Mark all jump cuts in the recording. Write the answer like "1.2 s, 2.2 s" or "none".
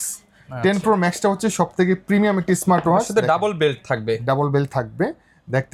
none